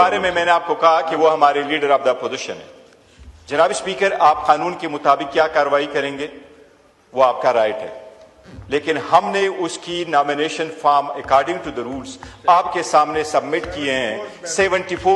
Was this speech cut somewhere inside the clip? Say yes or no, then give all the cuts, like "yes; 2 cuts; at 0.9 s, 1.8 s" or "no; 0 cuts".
no; 0 cuts